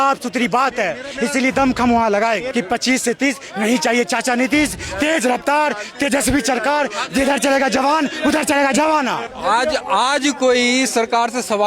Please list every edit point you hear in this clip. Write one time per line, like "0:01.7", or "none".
0:02.5
0:09.3